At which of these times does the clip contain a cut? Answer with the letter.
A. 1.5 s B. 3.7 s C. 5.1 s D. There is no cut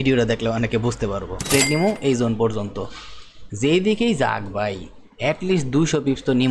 A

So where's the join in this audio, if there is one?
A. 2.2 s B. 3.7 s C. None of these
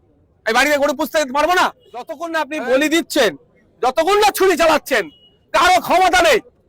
A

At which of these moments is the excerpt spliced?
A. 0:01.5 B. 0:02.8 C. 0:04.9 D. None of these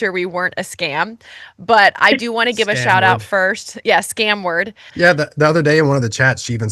C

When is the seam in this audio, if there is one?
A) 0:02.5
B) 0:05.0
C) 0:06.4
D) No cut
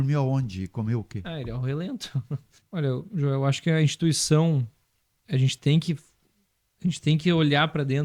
A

